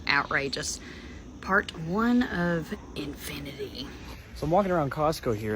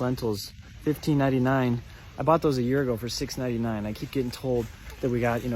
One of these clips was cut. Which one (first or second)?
first